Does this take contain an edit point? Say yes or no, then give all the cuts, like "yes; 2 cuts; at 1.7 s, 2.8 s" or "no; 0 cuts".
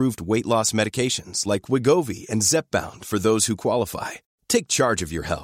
no; 0 cuts